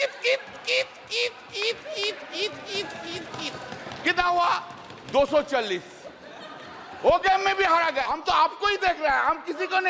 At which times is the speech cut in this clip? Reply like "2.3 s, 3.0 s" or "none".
8.1 s